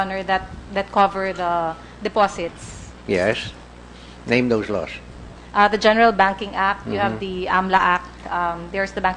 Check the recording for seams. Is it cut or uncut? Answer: cut